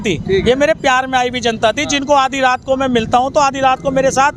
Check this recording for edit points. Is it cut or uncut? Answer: uncut